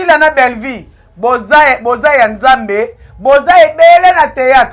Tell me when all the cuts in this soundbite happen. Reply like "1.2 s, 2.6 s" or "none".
none